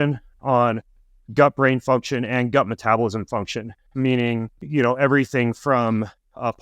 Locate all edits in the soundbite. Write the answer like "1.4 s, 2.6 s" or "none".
4.6 s